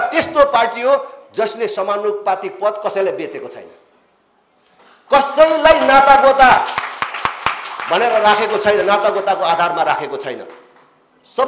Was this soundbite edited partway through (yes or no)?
no